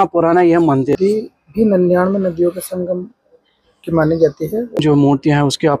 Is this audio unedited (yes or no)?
no